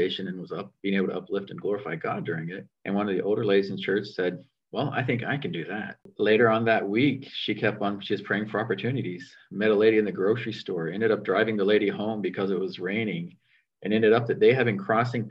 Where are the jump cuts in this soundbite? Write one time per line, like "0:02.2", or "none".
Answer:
0:02.7
0:04.5
0:06.1